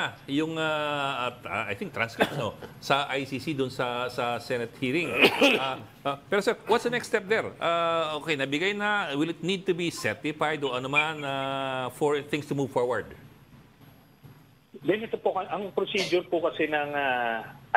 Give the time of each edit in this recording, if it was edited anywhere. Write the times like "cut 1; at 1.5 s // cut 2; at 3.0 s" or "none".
none